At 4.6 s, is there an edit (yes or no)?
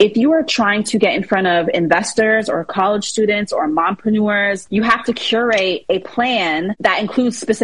yes